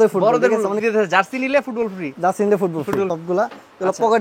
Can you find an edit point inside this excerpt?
yes; 2 cuts; at 0.8 s, 3.2 s

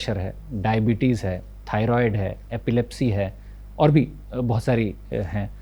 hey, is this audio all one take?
yes; 0 cuts

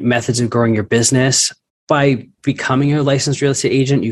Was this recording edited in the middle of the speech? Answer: yes; 1 cut; at 2.3 s

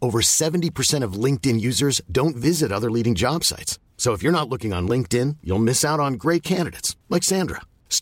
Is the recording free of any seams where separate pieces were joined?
yes; 0 cuts

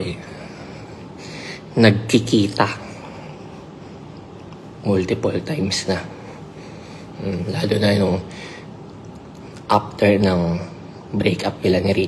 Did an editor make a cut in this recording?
no; 0 cuts

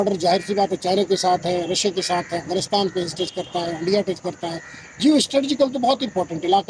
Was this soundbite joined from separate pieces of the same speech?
no; 0 cuts

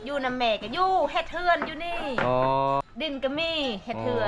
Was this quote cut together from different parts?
yes; 1 cut; at 2.8 s

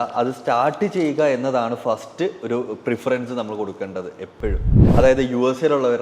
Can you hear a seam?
yes; 1 cut; at 4.7 s

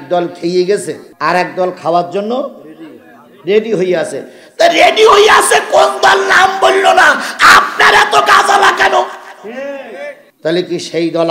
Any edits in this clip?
yes; 2 cuts; at 1.0 s, 10.2 s

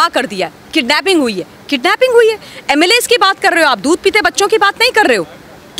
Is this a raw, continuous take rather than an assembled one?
yes; 0 cuts

